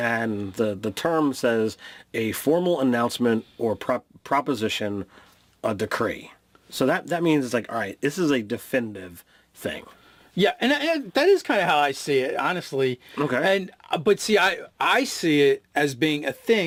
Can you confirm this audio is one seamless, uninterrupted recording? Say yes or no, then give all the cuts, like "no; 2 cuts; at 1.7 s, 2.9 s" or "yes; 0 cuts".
yes; 0 cuts